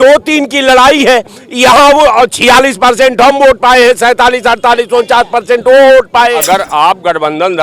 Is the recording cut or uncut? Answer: cut